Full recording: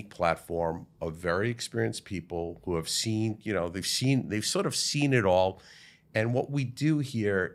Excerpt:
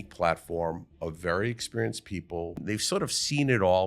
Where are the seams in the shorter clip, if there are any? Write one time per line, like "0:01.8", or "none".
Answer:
0:02.6

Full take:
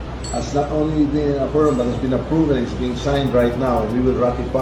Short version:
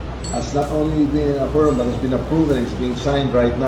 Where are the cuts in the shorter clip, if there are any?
none

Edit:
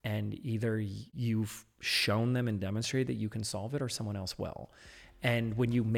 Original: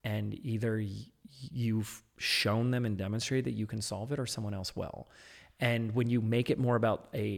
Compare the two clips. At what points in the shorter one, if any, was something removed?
0:01.0

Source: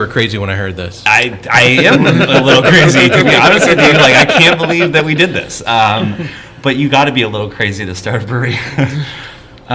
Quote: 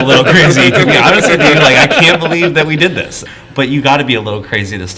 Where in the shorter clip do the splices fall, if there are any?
0:03.2

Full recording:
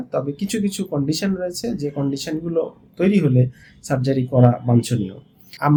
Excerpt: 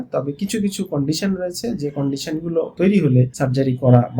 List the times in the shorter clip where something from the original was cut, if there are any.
0:02.7
0:03.3

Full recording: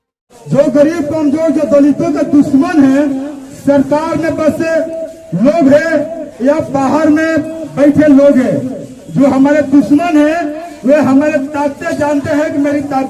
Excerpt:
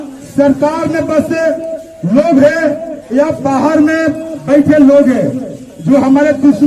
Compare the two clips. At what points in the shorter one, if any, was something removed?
none

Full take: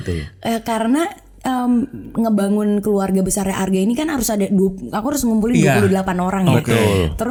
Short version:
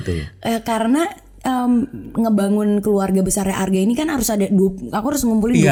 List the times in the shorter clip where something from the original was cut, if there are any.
none

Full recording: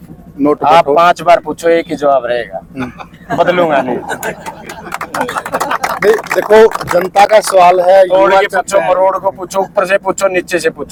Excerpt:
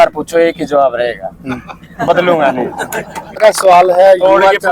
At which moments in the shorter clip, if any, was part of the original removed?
0:03.4

